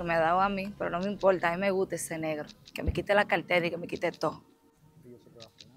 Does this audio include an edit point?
yes; 1 cut; at 4.6 s

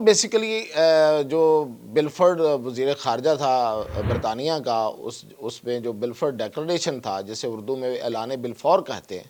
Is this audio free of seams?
yes; 0 cuts

